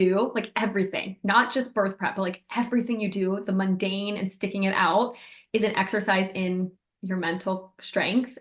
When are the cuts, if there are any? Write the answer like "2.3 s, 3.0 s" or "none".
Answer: none